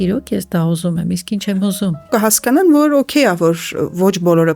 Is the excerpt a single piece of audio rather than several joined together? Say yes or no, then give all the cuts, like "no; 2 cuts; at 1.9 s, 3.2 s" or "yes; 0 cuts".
no; 1 cut; at 2.1 s